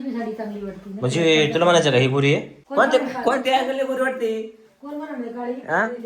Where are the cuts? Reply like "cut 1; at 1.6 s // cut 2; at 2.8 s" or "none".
cut 1; at 2.6 s

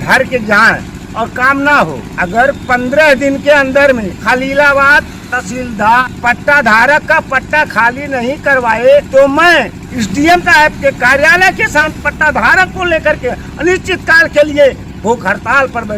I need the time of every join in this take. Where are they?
cut 1; at 1.0 s // cut 2; at 2.1 s // cut 3; at 4.1 s // cut 4; at 6.0 s // cut 5; at 9.1 s // cut 6; at 9.8 s // cut 7; at 11.9 s

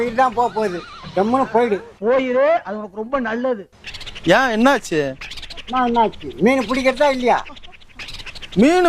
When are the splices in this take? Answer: none

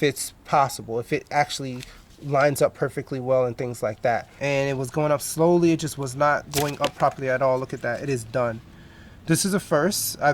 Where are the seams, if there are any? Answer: cut 1; at 4.2 s

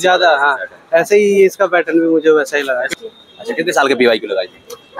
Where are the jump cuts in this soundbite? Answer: cut 1; at 2.9 s

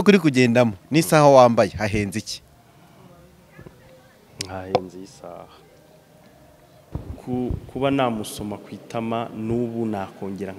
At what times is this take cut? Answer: cut 1; at 7.0 s

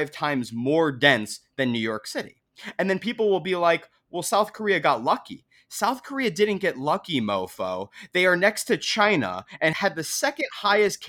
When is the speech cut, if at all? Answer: cut 1; at 9.7 s

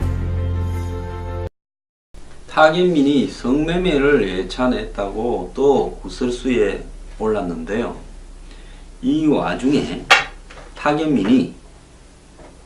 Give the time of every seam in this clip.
none

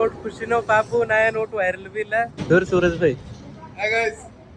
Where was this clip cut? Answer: cut 1; at 2.4 s

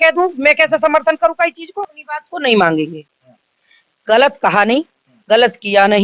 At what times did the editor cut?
cut 1; at 2.0 s

